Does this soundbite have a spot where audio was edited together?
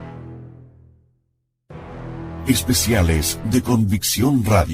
yes; 1 cut; at 2.4 s

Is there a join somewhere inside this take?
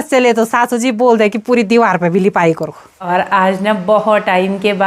yes; 1 cut; at 3.0 s

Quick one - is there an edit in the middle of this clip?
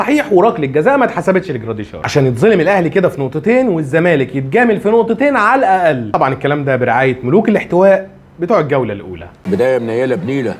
no; 0 cuts

